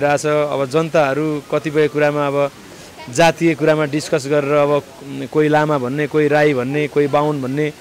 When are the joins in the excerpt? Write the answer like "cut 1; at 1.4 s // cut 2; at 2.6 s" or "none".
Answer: none

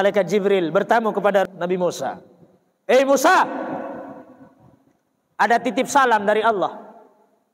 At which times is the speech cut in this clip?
cut 1; at 1.5 s

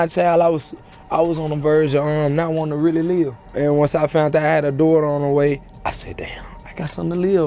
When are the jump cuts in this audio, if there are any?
cut 1; at 3.4 s // cut 2; at 5.7 s

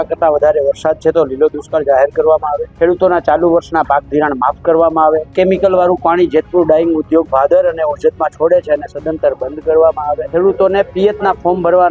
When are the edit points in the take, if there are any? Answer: cut 1; at 2.6 s // cut 2; at 5.3 s // cut 3; at 10.2 s

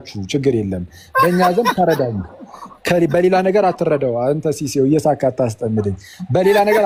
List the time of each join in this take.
none

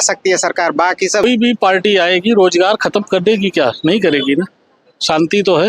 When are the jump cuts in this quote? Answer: cut 1; at 1.2 s

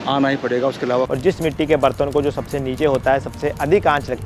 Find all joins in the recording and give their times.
cut 1; at 1.1 s

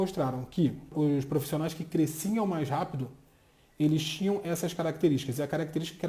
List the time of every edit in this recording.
cut 1; at 0.9 s

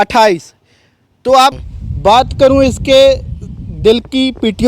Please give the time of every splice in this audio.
cut 1; at 1.6 s

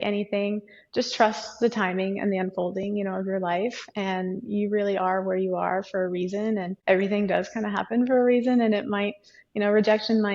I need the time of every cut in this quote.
cut 1; at 6.7 s

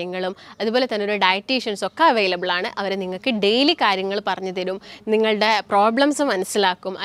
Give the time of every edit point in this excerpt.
none

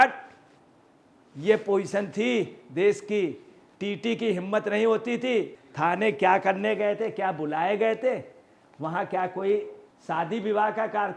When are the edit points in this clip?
cut 1; at 5.6 s

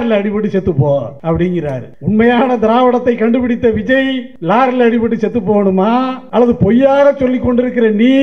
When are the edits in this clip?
cut 1; at 1.1 s // cut 2; at 1.9 s // cut 3; at 4.3 s // cut 4; at 6.2 s

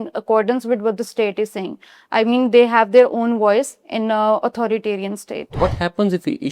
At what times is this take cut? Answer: cut 1; at 5.5 s

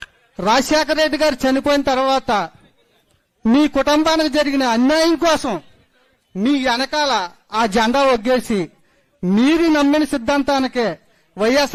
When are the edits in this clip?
none

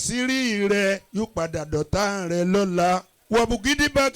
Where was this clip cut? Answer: cut 1; at 1.1 s // cut 2; at 3.1 s

